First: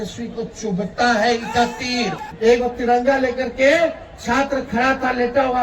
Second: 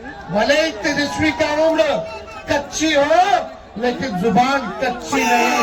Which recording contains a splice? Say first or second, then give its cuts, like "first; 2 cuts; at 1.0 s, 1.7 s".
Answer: first; 1 cut; at 2.2 s